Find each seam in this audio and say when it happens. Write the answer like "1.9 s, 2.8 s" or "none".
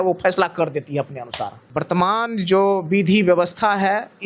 1.6 s